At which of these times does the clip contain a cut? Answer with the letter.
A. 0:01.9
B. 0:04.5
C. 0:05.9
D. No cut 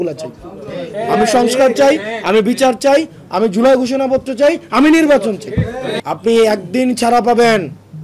C